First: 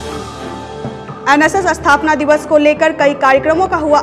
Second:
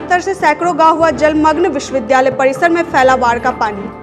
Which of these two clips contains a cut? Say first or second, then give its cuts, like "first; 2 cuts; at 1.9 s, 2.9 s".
first; 1 cut; at 1.1 s